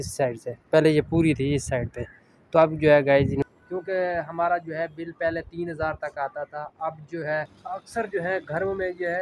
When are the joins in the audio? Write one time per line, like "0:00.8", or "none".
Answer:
0:03.4
0:07.6